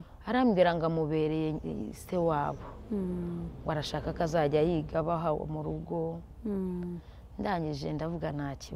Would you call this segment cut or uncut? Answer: uncut